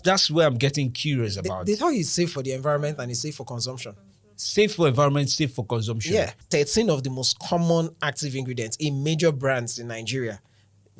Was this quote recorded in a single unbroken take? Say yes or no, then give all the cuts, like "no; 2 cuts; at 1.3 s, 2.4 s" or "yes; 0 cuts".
no; 1 cut; at 6.4 s